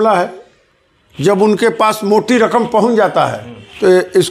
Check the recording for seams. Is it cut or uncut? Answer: uncut